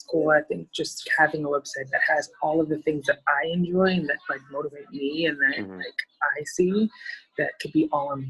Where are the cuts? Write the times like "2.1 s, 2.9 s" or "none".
1.1 s